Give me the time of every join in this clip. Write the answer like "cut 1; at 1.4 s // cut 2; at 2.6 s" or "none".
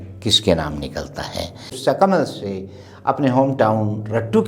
cut 1; at 1.8 s